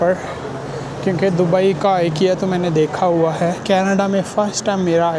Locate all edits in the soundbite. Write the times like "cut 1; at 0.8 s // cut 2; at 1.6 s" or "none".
cut 1; at 3.6 s